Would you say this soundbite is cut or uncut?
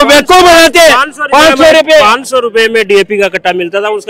uncut